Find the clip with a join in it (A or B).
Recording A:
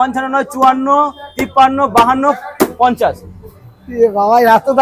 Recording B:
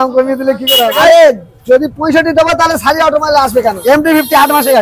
B